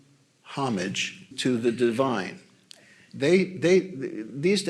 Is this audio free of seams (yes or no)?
no